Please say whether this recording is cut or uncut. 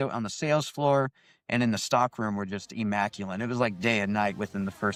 uncut